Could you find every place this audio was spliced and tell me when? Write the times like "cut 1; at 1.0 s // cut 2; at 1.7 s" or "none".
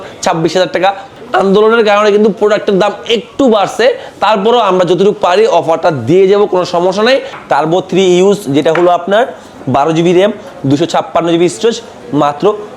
cut 1; at 1.1 s // cut 2; at 7.3 s